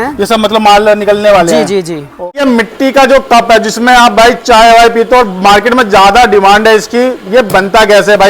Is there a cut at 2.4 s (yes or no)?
yes